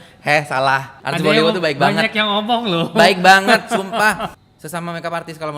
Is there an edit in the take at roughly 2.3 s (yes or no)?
no